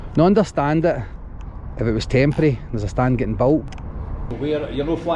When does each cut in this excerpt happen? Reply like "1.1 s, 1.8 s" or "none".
4.2 s